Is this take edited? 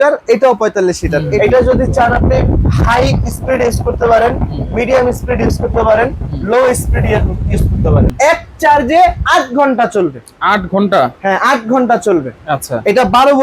yes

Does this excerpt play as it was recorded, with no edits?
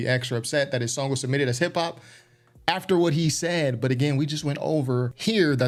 yes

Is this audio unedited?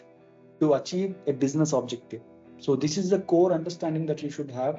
yes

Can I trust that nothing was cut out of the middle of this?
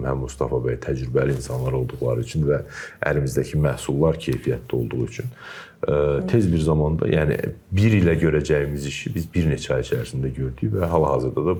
yes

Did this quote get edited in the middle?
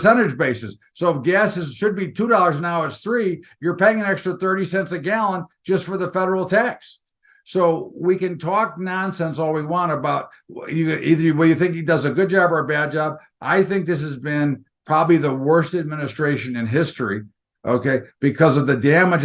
no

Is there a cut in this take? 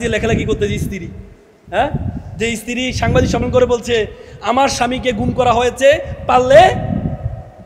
no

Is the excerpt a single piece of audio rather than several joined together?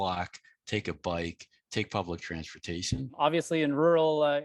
no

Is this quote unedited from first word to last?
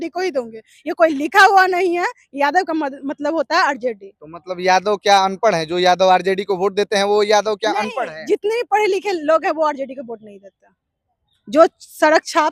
yes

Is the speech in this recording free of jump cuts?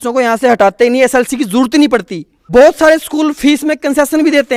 yes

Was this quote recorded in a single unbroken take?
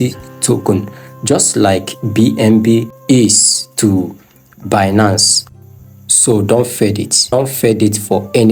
no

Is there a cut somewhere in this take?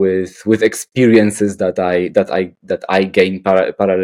no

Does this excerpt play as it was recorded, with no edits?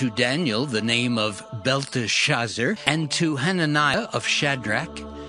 no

